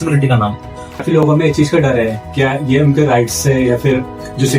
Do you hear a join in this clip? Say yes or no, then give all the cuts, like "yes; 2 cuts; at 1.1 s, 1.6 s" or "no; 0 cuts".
yes; 1 cut; at 1.2 s